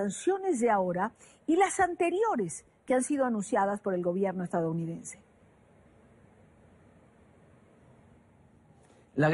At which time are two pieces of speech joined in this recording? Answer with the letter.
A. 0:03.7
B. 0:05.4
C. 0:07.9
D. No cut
D